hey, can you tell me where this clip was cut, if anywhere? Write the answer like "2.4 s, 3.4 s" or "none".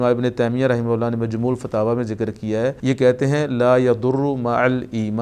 2.8 s